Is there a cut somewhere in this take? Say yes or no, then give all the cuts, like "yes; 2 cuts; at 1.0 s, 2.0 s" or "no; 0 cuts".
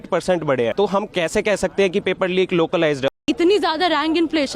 yes; 2 cuts; at 0.7 s, 3.2 s